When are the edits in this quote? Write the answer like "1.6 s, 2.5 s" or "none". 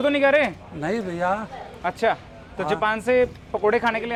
none